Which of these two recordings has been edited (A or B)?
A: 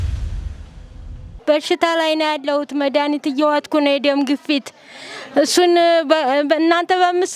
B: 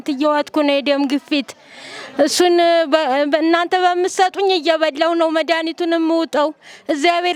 A